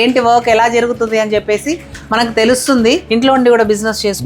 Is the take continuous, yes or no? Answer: no